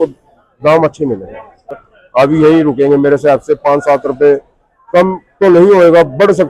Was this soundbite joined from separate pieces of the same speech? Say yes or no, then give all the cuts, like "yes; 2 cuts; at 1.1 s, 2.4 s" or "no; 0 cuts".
yes; 1 cut; at 1.8 s